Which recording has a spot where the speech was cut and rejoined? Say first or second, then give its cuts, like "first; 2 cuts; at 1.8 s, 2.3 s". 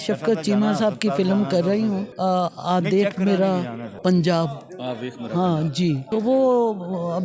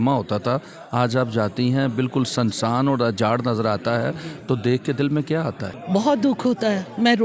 first; 3 cuts; at 2.1 s, 3.8 s, 6.0 s